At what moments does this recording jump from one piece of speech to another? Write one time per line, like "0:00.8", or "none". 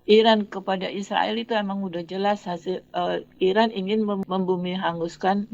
0:04.2